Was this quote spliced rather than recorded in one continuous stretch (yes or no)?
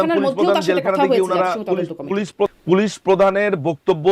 yes